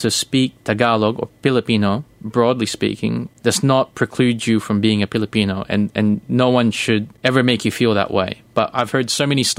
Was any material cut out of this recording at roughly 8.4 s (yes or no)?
no